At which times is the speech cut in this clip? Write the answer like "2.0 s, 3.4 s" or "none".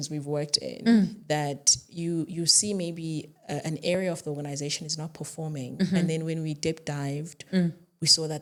none